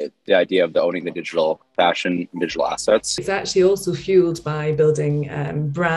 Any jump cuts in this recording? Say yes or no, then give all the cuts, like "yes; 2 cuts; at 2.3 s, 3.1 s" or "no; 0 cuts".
yes; 1 cut; at 3.4 s